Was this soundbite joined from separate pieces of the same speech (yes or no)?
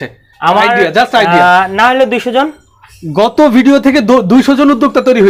no